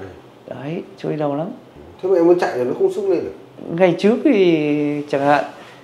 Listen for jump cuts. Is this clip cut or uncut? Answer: uncut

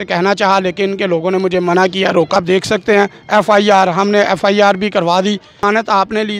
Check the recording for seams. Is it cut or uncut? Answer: cut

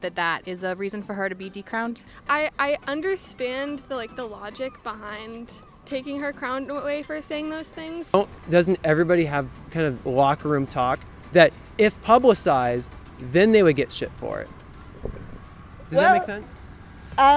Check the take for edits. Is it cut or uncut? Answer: cut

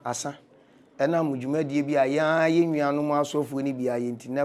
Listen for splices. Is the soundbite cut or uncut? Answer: uncut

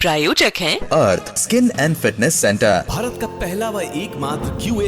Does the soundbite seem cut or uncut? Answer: uncut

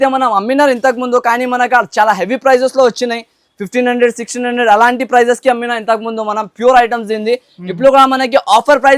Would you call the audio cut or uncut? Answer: uncut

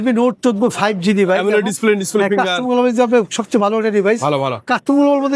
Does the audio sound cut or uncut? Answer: uncut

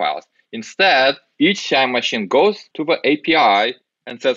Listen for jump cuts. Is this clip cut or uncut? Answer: cut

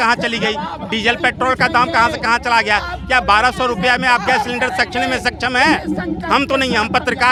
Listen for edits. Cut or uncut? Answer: uncut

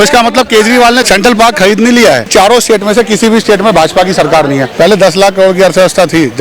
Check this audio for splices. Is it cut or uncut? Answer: cut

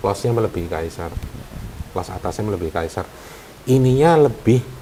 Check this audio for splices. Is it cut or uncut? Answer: uncut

